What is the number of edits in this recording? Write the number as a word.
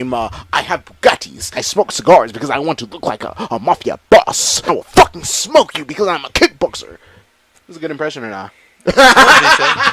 two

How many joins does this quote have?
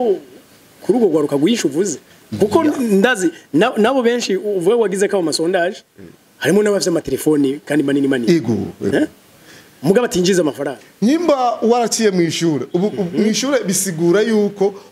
one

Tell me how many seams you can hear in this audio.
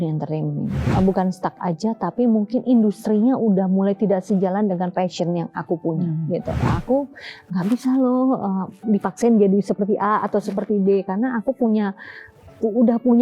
two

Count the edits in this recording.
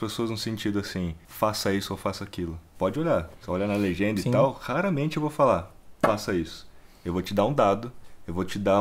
three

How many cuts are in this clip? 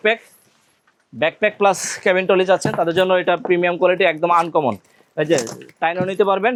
zero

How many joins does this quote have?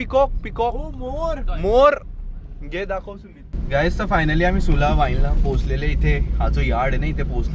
one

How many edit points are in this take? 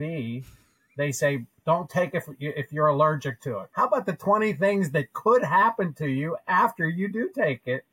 one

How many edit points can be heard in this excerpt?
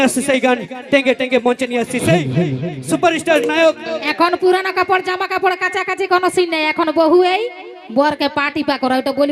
one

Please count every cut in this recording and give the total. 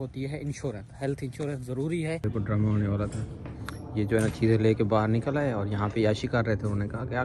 one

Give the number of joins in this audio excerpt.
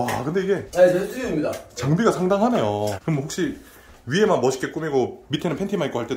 one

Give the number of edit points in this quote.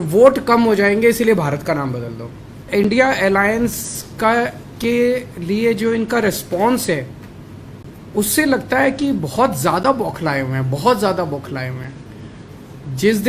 one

